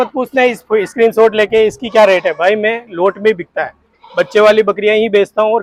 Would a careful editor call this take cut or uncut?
uncut